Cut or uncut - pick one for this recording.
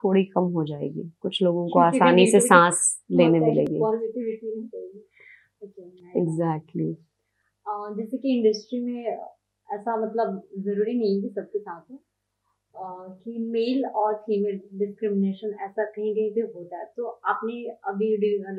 uncut